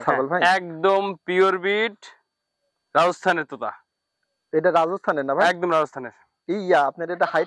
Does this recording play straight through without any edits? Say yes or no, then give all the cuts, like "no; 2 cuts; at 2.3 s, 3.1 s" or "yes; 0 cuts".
yes; 0 cuts